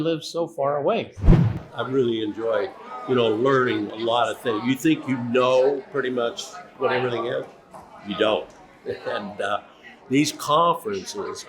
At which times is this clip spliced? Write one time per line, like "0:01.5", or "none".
0:01.5
0:02.8